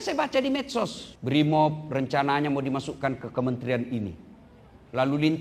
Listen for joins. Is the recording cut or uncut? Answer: cut